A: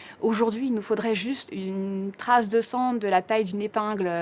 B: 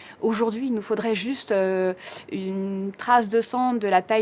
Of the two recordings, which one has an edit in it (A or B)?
A